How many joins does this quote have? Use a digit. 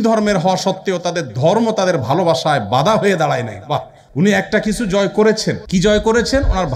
2